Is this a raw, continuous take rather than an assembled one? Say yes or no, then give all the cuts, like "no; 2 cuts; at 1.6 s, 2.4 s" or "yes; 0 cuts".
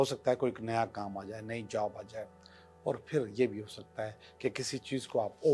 yes; 0 cuts